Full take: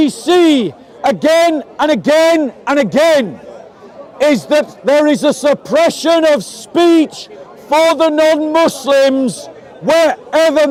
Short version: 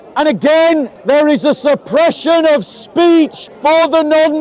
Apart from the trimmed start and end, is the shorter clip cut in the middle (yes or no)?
yes